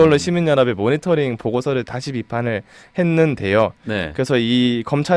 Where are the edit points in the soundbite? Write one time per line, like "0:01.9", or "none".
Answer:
none